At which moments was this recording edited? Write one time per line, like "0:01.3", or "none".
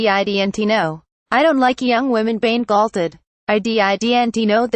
0:01.1